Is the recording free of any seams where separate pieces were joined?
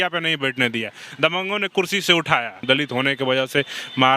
no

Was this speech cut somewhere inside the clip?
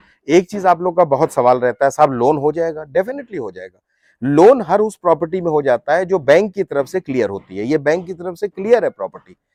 no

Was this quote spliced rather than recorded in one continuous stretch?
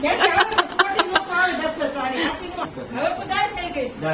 yes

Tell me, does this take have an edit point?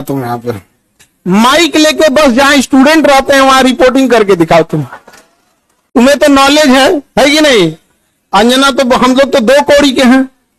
no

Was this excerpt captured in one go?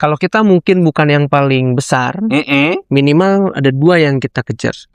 yes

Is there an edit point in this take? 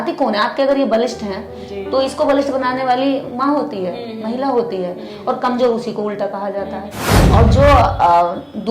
yes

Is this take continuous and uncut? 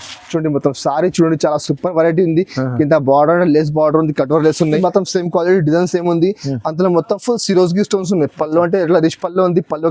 no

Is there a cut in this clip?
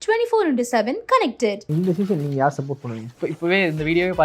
yes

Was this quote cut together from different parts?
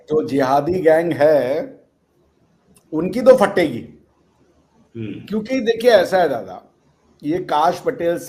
no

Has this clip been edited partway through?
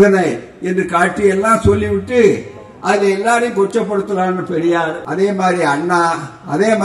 yes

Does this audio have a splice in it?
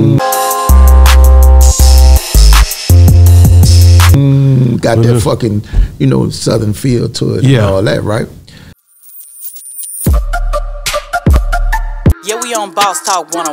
yes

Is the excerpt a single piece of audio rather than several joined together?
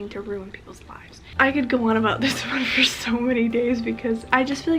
yes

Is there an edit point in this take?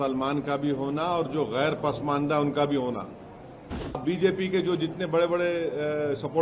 yes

